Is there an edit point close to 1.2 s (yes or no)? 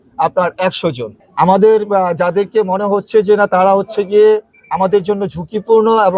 yes